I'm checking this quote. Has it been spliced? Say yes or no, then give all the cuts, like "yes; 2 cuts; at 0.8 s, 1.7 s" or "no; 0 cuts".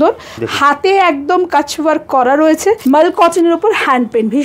yes; 1 cut; at 2.8 s